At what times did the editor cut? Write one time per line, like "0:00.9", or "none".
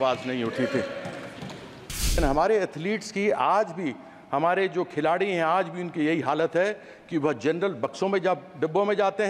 0:02.2

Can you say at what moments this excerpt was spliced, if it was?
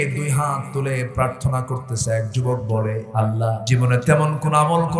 0:03.3

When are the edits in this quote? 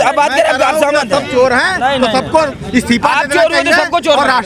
none

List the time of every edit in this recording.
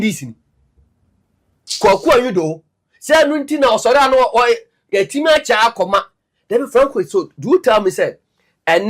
0:08.0

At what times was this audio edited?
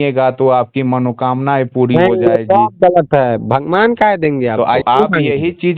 0:04.8

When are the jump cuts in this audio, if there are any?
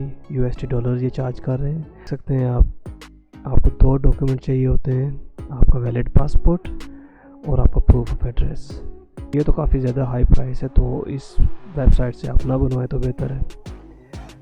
0:02.0
0:09.3

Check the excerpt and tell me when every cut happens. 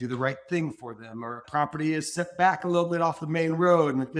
0:01.4

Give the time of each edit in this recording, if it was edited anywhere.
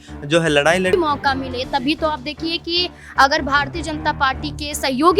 0:00.9

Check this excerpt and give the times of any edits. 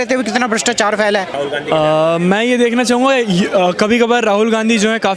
0:01.3

